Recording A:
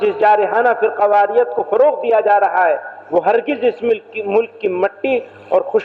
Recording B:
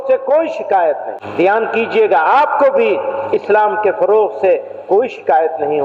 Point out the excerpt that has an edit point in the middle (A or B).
B